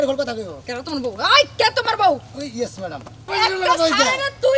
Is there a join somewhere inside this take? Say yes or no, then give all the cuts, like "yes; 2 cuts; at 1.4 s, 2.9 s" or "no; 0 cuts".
yes; 1 cut; at 3.3 s